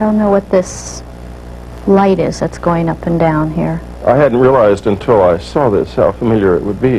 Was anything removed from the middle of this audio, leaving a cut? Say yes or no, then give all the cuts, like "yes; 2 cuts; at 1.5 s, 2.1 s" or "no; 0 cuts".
yes; 1 cut; at 3.9 s